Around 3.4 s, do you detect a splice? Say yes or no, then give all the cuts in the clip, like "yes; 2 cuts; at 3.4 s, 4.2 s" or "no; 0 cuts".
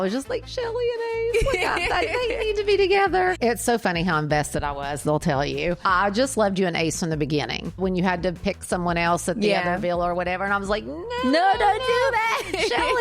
yes; 3 cuts; at 3.4 s, 5.8 s, 7.8 s